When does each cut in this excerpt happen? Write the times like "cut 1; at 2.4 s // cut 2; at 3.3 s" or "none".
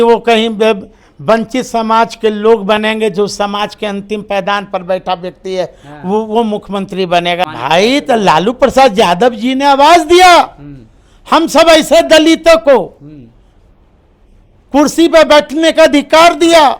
cut 1; at 7.5 s